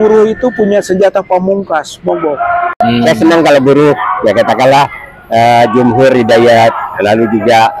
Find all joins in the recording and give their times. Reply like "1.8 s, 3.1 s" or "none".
2.8 s